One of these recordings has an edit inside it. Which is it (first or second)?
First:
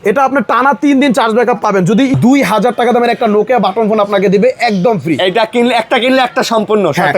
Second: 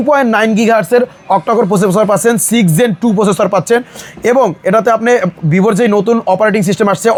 first